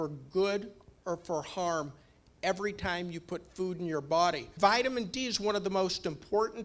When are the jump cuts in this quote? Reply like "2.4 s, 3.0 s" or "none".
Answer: 4.5 s

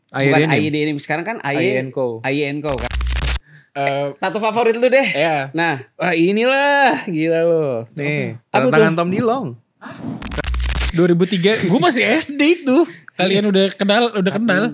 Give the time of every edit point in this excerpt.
3.2 s, 10.5 s

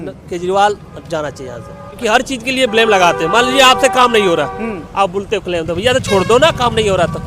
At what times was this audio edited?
2.0 s

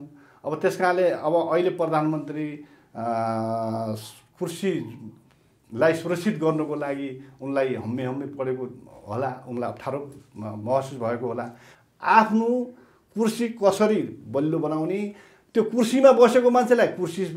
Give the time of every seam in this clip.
11.6 s

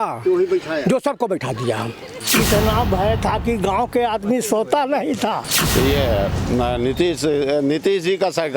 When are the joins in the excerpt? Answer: 2.0 s, 5.5 s

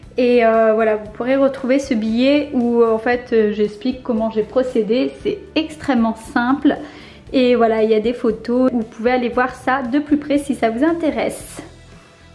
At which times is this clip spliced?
8.7 s

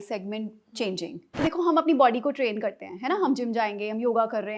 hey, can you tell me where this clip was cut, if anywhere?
1.4 s

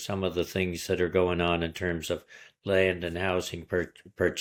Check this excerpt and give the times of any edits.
none

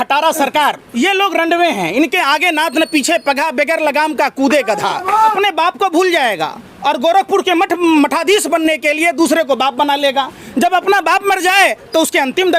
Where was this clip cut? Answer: 0.9 s, 5.3 s

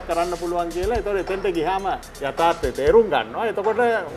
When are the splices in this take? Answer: 2.1 s

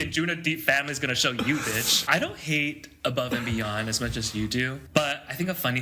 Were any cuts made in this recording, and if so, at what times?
2.0 s, 4.8 s

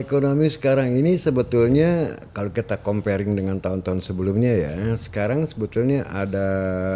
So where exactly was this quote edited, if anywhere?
none

